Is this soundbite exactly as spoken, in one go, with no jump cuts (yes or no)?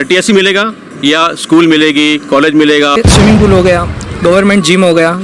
no